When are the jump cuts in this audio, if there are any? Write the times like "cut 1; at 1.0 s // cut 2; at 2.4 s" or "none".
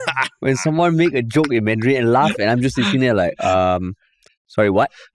none